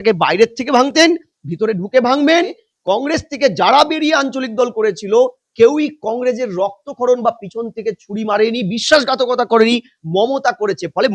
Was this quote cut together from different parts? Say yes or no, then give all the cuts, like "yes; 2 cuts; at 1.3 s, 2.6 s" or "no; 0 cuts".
yes; 1 cut; at 2.7 s